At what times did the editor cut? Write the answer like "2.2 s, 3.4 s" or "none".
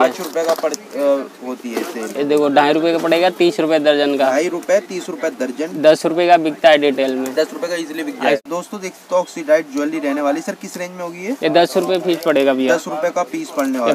8.4 s